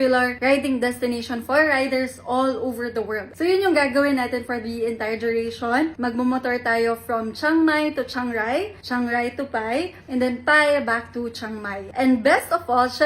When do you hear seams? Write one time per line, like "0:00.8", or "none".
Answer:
0:03.3
0:11.8